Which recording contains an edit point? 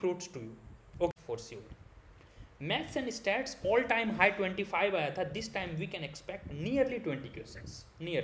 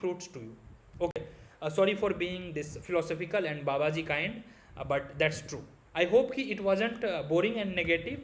first; 1 cut; at 1.1 s

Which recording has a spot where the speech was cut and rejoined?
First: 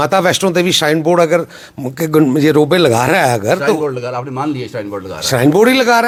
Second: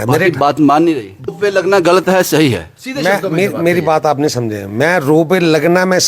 second; 1 cut; at 1.3 s

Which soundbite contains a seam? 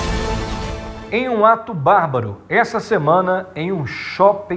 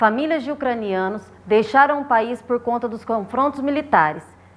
first; 1 cut; at 0.9 s

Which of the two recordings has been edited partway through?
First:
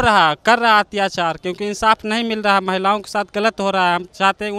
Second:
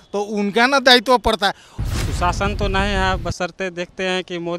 second; 1 cut; at 1.7 s

